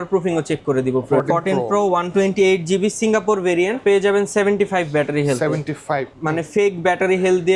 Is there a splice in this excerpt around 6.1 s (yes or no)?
yes